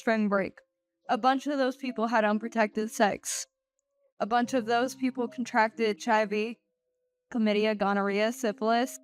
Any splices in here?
no; 0 cuts

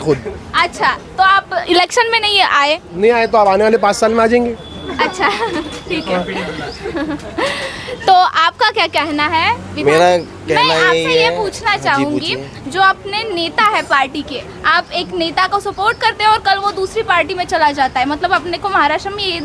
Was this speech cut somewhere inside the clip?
no; 0 cuts

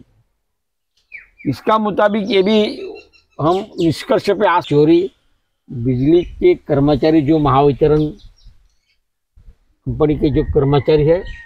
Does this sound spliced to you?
yes; 1 cut; at 4.6 s

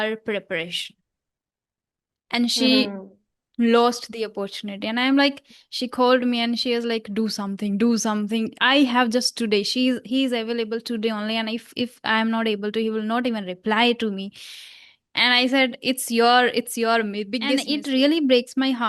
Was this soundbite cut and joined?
yes; 1 cut; at 17.6 s

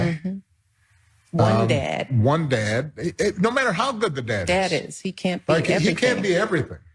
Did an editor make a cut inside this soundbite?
yes; 1 cut; at 4.6 s

